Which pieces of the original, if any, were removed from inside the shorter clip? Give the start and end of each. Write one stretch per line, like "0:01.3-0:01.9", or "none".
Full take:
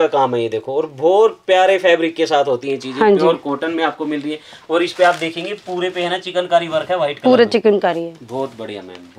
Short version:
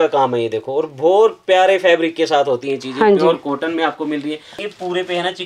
0:04.5-0:05.4

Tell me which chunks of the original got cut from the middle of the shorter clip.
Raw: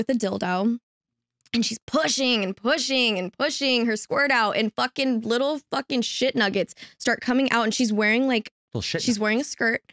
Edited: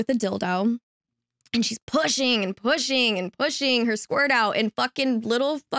none

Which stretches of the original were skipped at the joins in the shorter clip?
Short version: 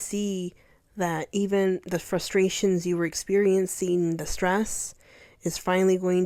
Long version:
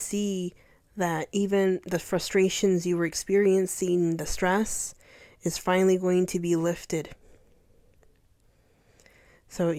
none

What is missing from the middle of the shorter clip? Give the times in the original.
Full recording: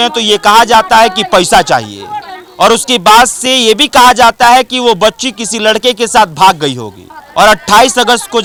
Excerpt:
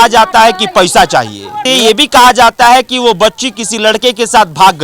0:02.2-0:03.4

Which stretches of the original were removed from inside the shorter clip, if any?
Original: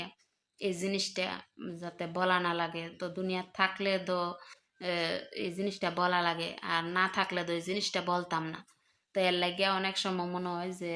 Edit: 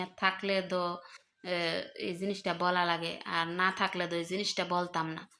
none

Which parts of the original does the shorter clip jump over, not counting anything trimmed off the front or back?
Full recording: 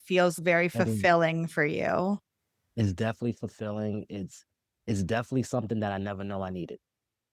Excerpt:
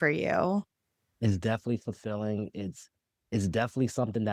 none

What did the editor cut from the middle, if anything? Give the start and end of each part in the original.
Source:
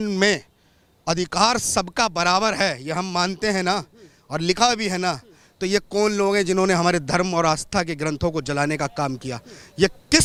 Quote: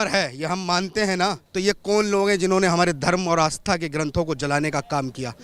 0:03.9-0:05.5

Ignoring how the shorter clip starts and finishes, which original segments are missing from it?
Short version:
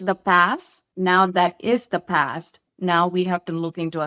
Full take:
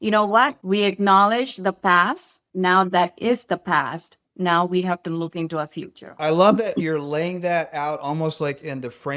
none

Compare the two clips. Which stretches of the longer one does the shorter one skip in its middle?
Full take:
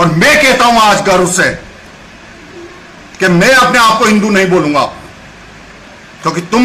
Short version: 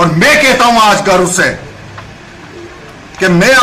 none

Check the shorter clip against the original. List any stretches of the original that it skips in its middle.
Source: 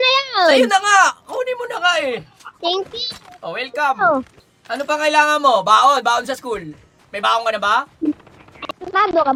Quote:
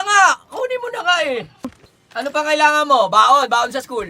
0:02.5-0:04.3

